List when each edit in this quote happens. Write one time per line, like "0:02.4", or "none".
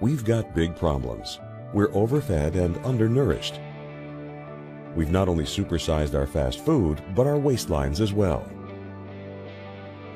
none